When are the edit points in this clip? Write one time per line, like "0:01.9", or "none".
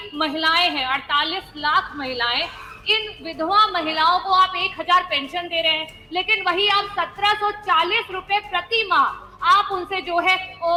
none